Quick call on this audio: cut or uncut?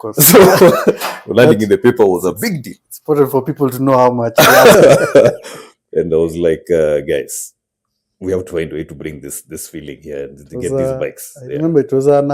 cut